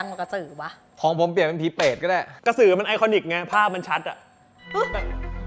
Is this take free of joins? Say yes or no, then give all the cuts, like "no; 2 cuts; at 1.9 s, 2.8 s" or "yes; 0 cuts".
no; 2 cuts; at 0.9 s, 2.3 s